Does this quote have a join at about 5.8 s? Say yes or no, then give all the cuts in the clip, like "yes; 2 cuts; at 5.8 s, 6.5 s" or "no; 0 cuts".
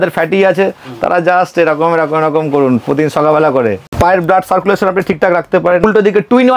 yes; 2 cuts; at 3.8 s, 5.8 s